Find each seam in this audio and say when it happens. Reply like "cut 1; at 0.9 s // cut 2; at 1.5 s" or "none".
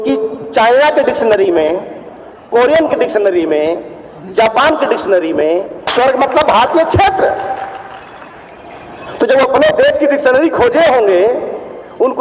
cut 1; at 5.8 s